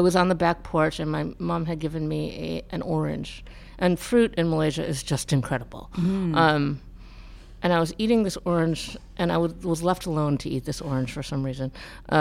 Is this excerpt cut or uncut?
uncut